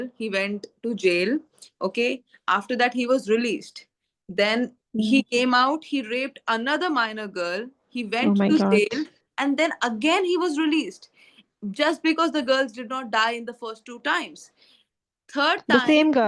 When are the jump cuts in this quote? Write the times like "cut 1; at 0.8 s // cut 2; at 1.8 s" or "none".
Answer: none